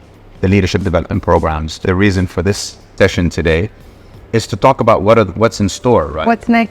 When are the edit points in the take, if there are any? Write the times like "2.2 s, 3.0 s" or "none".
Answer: 1.9 s, 2.9 s